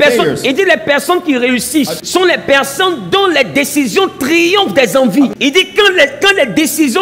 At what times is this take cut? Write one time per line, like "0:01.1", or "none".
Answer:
0:02.0
0:05.3